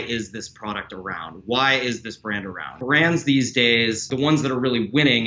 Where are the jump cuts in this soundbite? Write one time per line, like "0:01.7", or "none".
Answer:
0:02.7
0:04.1